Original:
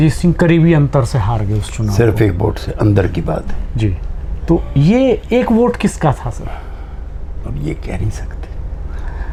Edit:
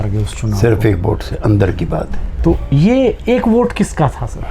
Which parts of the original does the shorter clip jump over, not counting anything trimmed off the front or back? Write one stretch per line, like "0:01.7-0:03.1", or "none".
0:03.6-0:04.3